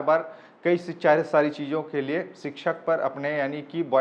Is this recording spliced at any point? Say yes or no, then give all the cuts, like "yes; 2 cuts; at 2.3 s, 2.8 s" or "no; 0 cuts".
no; 0 cuts